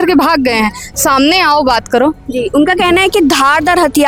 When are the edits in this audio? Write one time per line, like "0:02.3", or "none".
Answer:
none